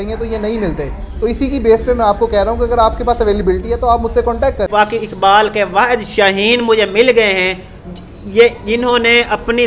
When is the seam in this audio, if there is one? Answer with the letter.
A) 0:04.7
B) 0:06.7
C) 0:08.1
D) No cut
A